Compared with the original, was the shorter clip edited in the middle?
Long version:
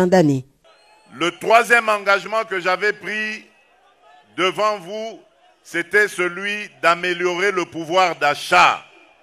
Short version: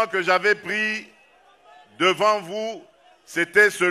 no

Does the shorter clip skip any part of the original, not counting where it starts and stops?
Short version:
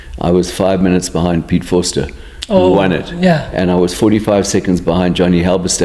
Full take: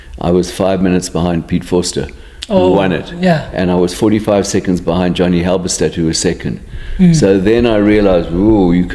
no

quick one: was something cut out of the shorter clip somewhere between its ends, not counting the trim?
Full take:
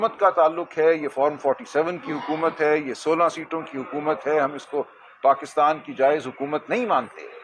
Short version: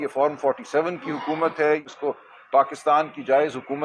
yes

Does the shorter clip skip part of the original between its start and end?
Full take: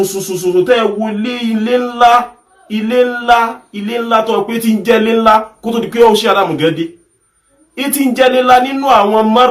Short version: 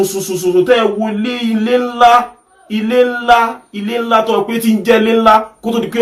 no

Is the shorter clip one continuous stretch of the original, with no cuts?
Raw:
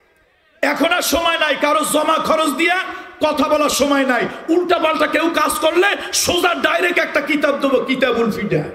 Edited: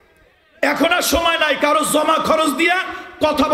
yes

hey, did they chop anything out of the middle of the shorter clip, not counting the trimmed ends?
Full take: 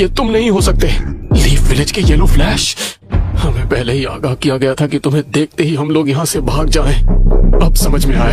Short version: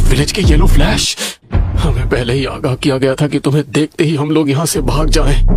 no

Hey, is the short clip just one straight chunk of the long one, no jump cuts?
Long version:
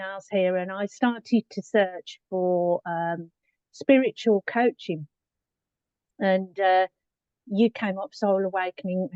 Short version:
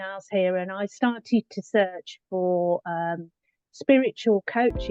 yes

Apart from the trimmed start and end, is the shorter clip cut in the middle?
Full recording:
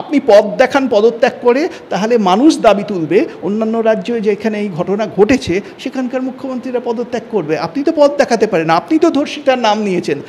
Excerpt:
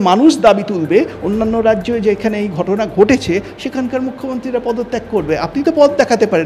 no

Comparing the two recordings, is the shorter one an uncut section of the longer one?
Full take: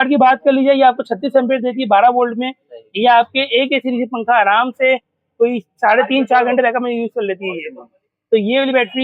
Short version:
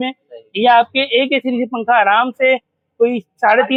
yes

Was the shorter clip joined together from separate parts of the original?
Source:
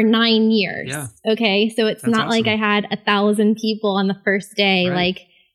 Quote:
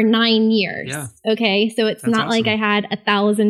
no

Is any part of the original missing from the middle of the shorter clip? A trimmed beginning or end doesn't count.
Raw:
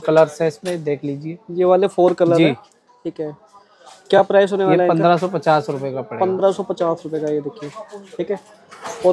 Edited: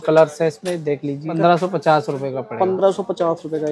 yes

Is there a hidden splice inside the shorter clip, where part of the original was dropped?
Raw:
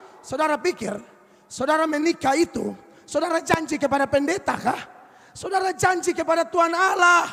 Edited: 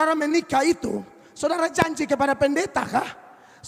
no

